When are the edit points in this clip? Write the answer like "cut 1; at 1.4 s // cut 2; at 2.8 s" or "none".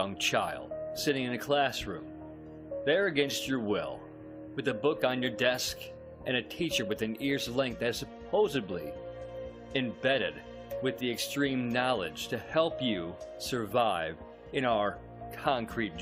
cut 1; at 14.6 s